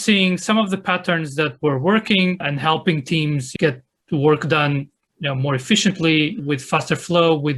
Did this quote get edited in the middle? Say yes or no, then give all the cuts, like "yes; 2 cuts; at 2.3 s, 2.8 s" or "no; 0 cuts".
no; 0 cuts